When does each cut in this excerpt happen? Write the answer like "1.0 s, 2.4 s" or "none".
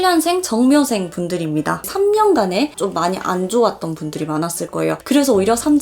1.8 s, 2.7 s